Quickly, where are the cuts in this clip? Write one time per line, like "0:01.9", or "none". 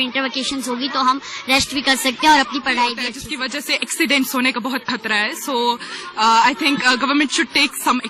0:03.2